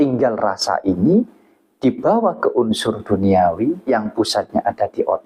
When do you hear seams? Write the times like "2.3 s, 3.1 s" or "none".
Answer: none